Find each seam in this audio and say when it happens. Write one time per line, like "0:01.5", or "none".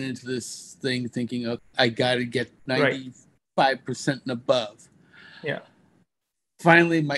0:01.6
0:02.5